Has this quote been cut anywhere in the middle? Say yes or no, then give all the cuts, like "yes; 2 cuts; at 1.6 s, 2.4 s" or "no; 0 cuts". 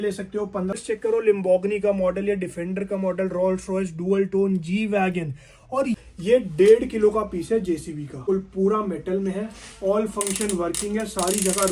yes; 3 cuts; at 0.7 s, 6.0 s, 8.2 s